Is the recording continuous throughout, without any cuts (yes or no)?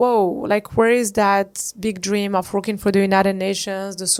yes